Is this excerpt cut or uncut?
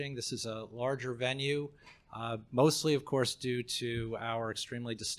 cut